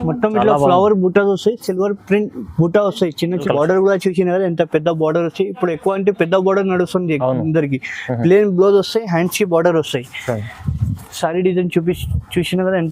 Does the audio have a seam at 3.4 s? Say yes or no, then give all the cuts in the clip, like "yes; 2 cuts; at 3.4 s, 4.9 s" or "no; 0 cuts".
yes; 1 cut; at 3.4 s